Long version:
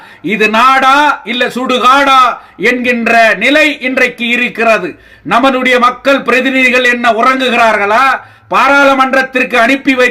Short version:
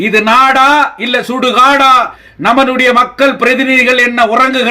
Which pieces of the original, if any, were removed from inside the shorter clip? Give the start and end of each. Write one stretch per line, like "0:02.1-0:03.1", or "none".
0:02.5-0:05.1